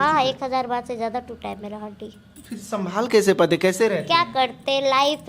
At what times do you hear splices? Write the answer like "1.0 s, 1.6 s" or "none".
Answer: none